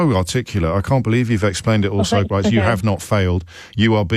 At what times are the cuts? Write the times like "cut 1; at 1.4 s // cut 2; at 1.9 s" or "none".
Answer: cut 1; at 2.3 s